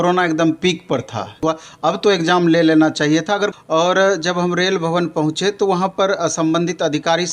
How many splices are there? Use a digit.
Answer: 2